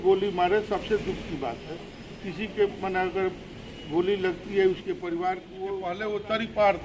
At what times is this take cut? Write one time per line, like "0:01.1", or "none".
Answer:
0:05.5